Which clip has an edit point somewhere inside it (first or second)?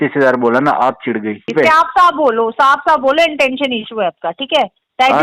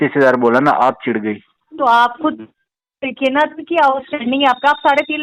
first